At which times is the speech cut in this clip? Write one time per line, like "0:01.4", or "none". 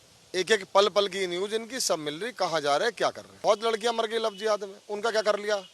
0:03.3